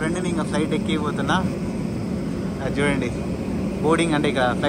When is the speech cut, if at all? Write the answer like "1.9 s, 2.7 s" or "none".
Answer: none